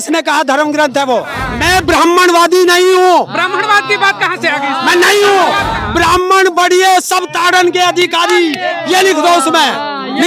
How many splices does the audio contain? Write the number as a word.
two